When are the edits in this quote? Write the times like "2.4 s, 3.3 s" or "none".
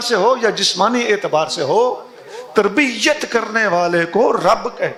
none